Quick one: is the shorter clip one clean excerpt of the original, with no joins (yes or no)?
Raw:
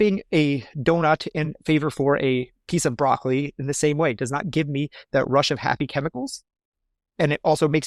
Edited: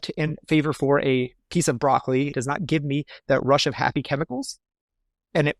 no